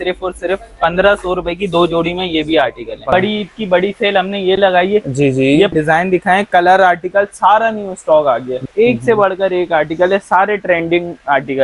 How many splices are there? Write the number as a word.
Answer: three